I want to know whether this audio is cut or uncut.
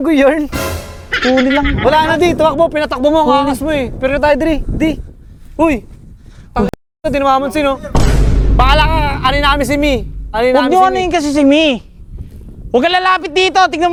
uncut